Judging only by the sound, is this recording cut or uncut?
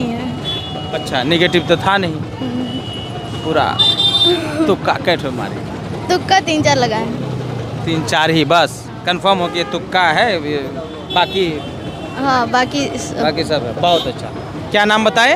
uncut